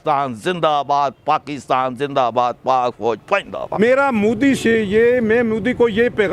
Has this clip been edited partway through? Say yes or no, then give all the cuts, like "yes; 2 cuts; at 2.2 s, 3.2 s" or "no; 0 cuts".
no; 0 cuts